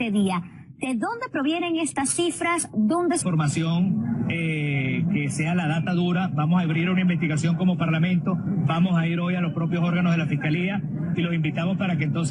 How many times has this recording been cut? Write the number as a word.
zero